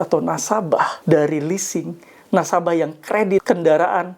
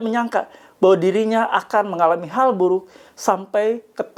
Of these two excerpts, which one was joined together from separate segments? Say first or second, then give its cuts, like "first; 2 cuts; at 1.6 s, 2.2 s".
first; 2 cuts; at 1.0 s, 3.4 s